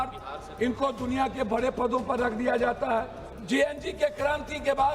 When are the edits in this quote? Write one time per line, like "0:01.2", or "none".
0:03.3